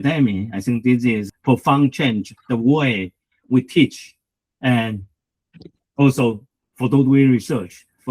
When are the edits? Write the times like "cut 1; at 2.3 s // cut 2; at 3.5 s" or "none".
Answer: cut 1; at 1.3 s